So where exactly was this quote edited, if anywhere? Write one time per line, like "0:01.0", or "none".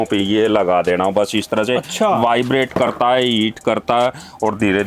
none